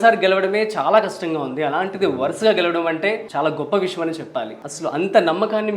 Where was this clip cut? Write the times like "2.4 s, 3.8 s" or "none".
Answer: 3.3 s, 4.6 s